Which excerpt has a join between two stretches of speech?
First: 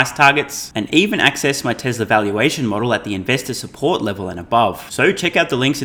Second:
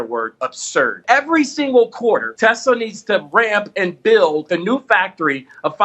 second; 3 cuts; at 1.0 s, 2.3 s, 4.5 s

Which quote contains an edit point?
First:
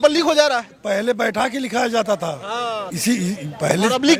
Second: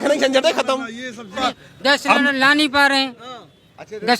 second; 1 cut; at 1.4 s

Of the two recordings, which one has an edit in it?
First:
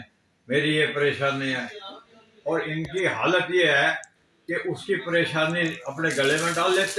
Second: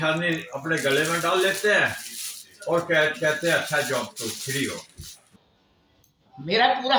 second; 1 cut; at 5.2 s

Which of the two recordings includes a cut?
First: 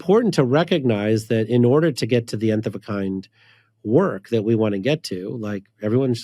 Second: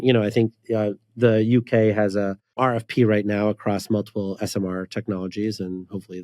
second; 1 cut; at 2.6 s

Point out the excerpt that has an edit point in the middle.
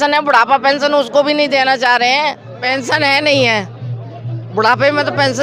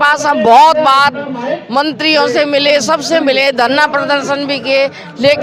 first; 1 cut; at 2.5 s

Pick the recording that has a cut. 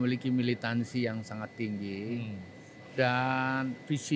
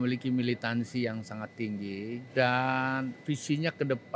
second; 1 cut; at 2.2 s

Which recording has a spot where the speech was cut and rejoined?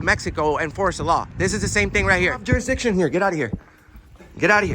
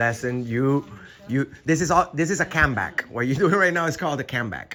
first; 1 cut; at 2.4 s

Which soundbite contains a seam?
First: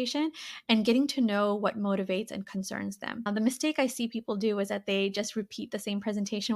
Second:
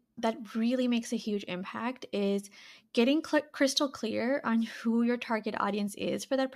first; 1 cut; at 3.3 s

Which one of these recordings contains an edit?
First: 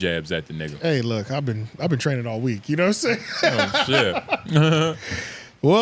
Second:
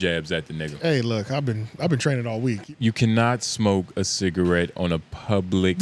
second; 1 cut; at 2.7 s

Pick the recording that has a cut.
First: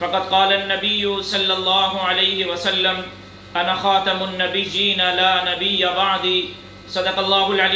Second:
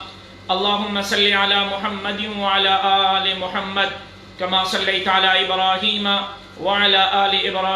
second; 1 cut; at 1.2 s

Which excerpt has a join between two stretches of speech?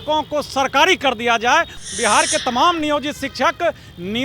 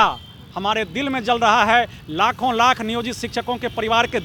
first; 1 cut; at 1.8 s

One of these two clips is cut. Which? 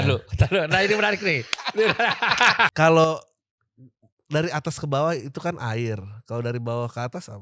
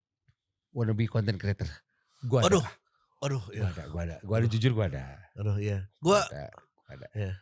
first; 1 cut; at 2.7 s

